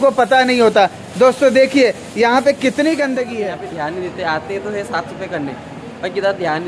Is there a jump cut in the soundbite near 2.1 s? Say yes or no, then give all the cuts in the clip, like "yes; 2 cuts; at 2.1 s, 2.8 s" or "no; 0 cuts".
no; 1 cut; at 3.4 s